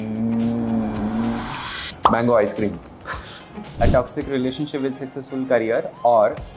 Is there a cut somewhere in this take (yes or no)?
yes